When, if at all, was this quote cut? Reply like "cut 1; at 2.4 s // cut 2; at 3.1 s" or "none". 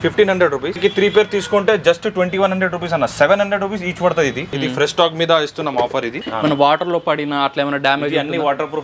cut 1; at 0.8 s // cut 2; at 4.4 s // cut 3; at 6.2 s